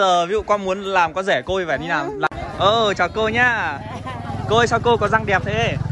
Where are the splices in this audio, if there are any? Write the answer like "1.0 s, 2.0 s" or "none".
2.3 s